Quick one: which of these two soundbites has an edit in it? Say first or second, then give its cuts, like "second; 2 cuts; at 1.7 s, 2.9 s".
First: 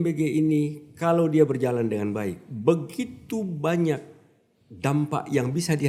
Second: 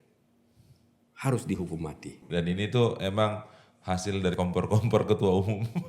second; 1 cut; at 2.2 s